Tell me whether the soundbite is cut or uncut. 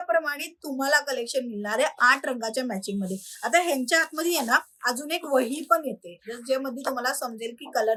uncut